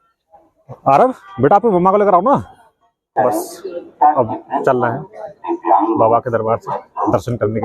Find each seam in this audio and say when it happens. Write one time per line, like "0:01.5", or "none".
0:03.1